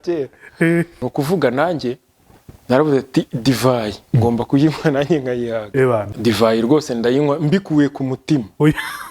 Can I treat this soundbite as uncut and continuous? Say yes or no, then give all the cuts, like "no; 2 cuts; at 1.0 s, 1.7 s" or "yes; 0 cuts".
no; 2 cuts; at 1.0 s, 6.1 s